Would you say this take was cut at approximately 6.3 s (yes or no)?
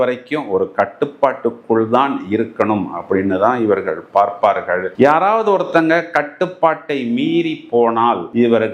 no